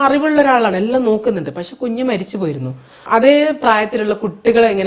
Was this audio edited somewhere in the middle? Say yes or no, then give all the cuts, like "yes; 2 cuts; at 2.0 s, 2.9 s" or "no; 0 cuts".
yes; 1 cut; at 3.1 s